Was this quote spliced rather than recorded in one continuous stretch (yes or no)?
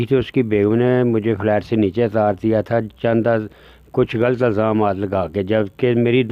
no